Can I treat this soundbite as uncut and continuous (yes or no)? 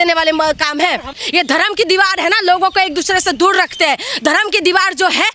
no